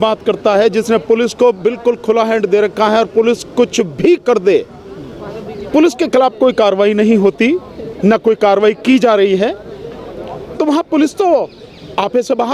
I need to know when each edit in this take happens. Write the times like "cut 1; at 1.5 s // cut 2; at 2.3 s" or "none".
none